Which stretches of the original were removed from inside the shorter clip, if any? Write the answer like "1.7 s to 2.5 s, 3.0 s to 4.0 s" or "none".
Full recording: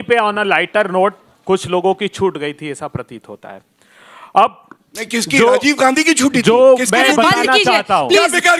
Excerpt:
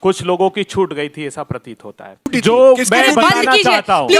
3.7 s to 6.3 s